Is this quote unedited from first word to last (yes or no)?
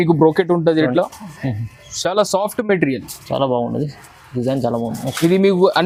yes